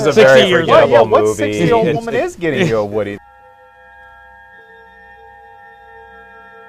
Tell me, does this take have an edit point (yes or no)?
yes